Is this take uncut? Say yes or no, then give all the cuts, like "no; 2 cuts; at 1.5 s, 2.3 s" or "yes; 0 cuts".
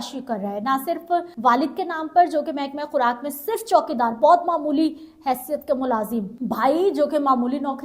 no; 2 cuts; at 1.3 s, 6.3 s